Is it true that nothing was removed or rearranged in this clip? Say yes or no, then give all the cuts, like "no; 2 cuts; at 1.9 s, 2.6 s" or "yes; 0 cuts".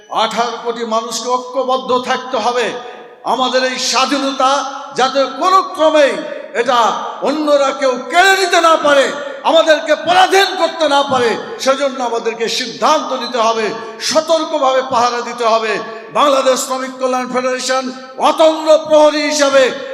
yes; 0 cuts